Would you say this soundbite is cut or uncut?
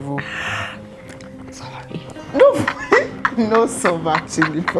uncut